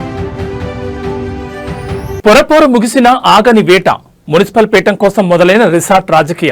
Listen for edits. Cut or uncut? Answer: uncut